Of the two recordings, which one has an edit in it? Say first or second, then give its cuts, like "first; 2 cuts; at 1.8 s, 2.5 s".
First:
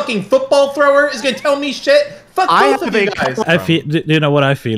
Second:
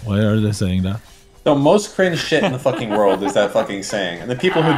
first; 1 cut; at 3.4 s